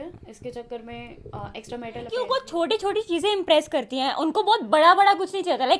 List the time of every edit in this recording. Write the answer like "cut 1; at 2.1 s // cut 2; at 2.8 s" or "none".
cut 1; at 2.1 s